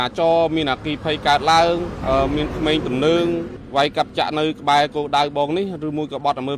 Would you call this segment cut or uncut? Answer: cut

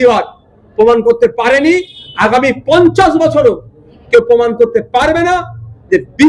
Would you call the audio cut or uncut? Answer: uncut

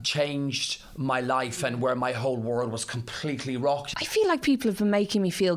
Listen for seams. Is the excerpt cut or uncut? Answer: cut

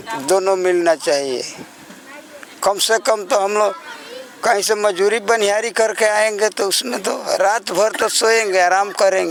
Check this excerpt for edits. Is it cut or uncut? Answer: uncut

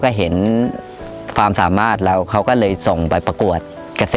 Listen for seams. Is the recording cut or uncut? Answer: cut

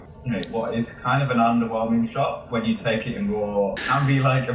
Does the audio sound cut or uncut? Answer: uncut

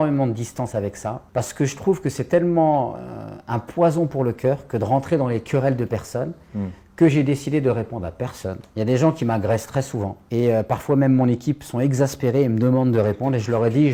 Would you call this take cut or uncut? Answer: uncut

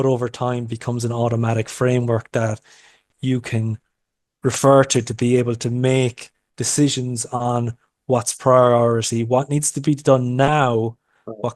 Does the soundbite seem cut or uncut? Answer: uncut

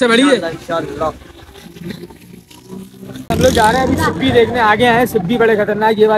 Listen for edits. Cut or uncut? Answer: cut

